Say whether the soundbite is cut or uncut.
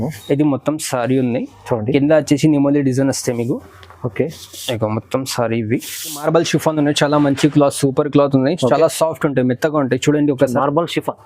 cut